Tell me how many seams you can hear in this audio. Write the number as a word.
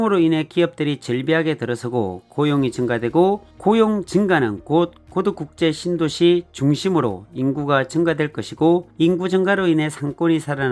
zero